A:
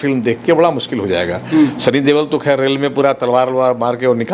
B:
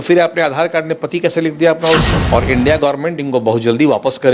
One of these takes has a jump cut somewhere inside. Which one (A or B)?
B